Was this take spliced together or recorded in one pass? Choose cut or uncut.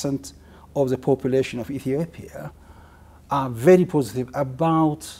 uncut